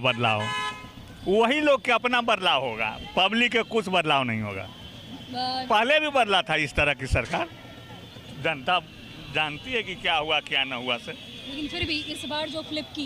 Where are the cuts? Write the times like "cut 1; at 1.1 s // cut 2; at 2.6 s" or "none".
none